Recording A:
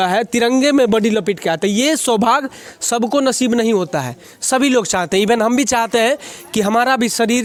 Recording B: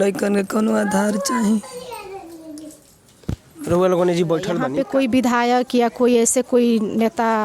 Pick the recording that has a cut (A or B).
B